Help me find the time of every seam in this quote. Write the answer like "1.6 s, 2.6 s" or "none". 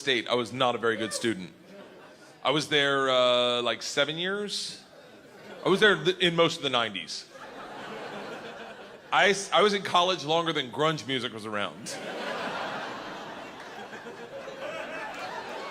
none